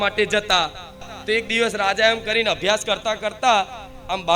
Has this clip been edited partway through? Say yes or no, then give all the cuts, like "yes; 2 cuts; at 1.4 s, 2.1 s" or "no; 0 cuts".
yes; 1 cut; at 1.1 s